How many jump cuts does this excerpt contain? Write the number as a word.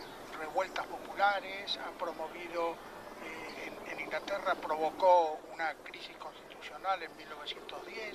one